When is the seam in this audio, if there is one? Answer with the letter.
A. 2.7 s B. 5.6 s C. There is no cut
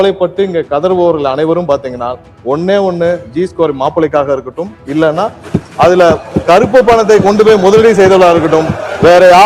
C